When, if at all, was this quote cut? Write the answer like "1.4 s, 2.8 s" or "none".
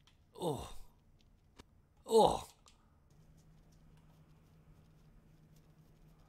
3.1 s

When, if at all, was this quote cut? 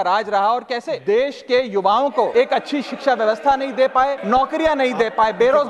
0.9 s, 2.3 s, 4.2 s

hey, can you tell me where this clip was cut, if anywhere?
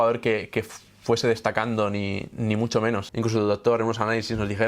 3.1 s

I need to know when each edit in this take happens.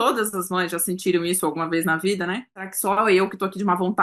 2.7 s

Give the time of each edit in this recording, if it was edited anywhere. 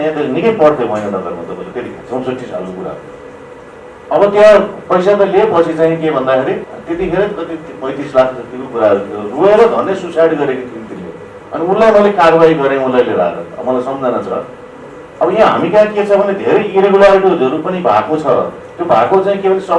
2.0 s, 6.7 s

